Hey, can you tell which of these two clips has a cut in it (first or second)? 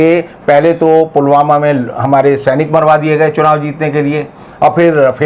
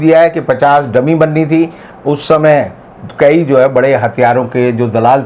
second